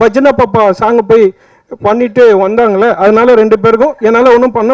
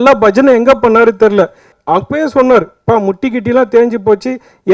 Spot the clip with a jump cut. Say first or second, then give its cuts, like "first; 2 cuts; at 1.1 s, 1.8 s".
second; 1 cut; at 1.8 s